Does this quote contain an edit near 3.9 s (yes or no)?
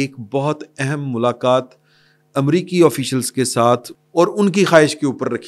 yes